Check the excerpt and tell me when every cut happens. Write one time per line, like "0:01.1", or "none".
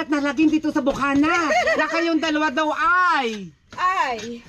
none

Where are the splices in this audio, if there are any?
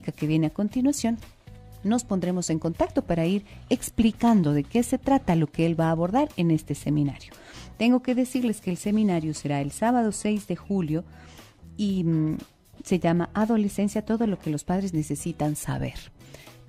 0:02.9

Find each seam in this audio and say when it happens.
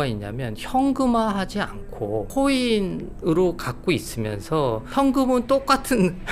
0:02.3
0:04.8

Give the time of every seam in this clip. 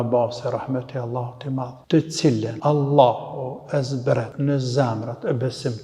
0:01.8
0:02.5
0:04.3

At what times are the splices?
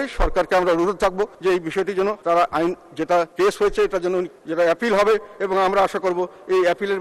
0:01.3
0:02.2
0:03.3
0:04.4

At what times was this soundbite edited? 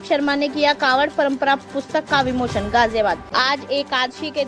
0:03.2

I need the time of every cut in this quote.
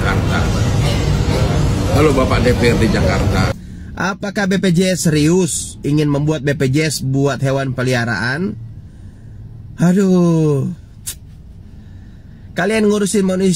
0:03.6

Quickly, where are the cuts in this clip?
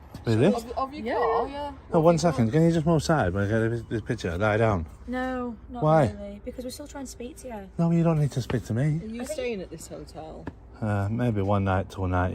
none

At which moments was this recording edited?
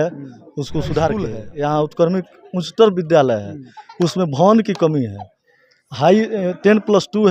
0:01.4

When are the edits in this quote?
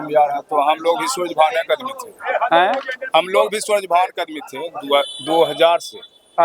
none

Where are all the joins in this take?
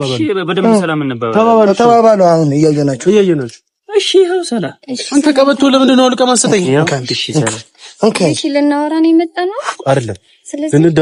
none

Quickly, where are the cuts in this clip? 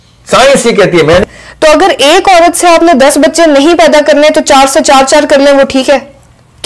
0:01.2

